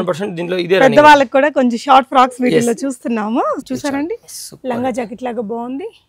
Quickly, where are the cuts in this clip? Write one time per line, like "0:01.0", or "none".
0:03.6